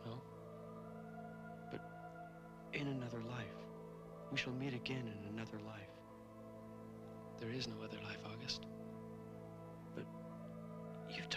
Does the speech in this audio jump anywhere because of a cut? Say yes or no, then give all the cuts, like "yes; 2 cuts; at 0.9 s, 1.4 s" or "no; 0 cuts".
yes; 1 cut; at 1.8 s